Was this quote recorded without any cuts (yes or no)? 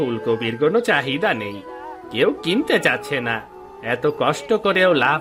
yes